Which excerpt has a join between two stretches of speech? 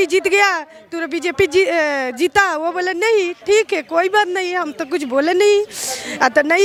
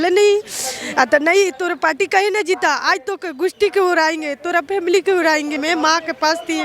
second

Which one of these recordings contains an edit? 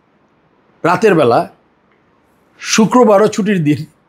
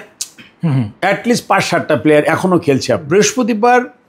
second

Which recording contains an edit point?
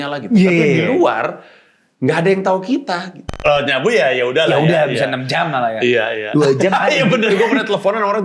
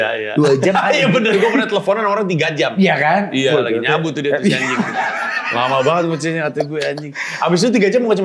first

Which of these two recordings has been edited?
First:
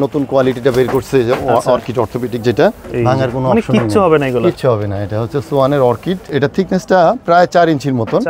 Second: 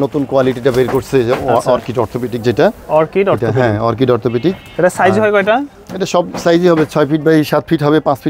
first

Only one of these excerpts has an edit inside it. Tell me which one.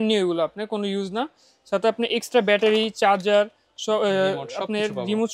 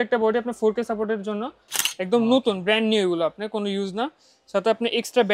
second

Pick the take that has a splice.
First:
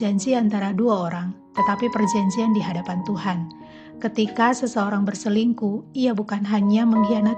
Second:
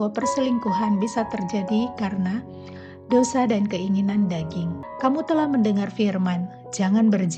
second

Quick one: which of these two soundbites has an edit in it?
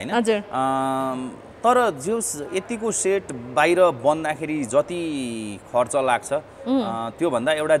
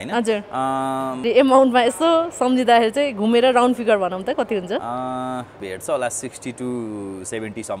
second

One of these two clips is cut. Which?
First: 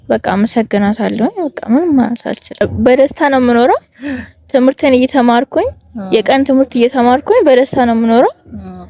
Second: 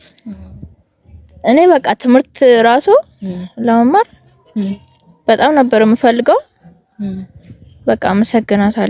first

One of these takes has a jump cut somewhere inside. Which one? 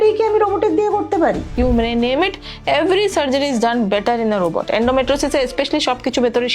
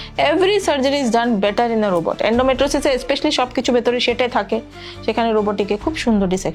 first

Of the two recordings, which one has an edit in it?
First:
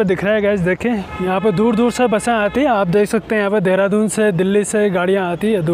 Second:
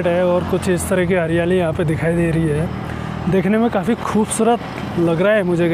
first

